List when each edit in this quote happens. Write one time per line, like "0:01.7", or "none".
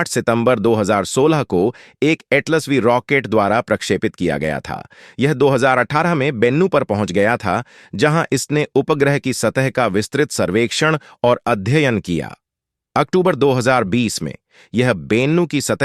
0:06.7